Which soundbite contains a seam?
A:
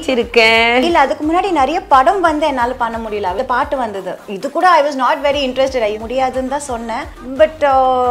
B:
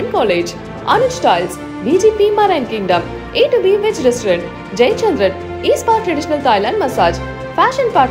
A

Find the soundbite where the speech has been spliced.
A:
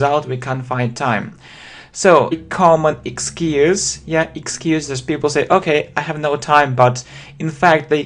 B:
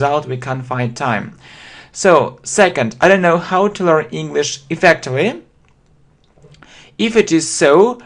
B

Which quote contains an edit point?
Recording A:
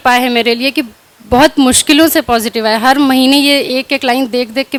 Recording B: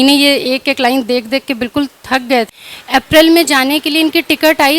B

